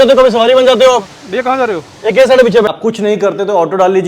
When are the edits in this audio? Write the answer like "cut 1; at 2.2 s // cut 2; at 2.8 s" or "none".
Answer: cut 1; at 2.7 s